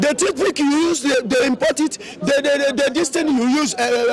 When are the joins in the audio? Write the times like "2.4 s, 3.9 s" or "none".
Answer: none